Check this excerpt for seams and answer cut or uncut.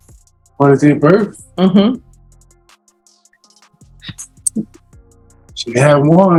uncut